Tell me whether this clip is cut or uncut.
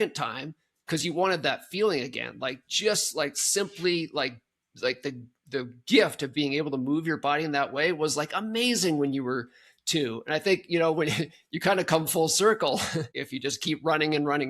cut